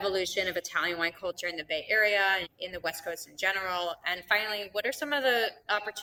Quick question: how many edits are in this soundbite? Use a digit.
0